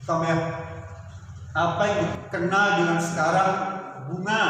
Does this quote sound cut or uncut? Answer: cut